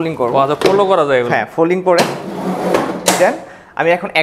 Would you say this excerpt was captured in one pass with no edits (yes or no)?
yes